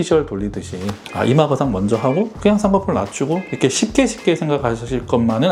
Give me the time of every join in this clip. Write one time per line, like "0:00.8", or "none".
none